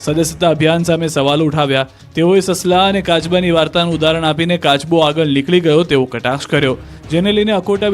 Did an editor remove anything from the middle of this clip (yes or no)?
yes